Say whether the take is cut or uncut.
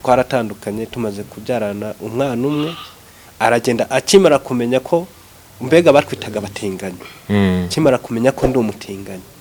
uncut